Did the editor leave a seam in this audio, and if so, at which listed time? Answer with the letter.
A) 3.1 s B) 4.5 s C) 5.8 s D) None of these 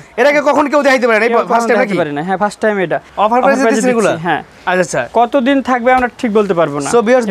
A